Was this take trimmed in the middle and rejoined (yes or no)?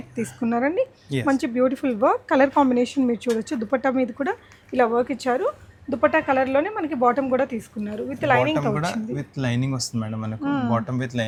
no